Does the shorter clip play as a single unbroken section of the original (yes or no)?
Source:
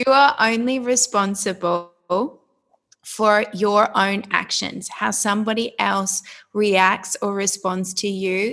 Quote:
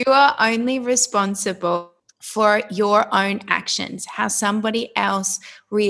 no